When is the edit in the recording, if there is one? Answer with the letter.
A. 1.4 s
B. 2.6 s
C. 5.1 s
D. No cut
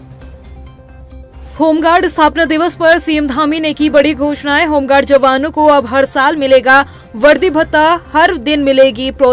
A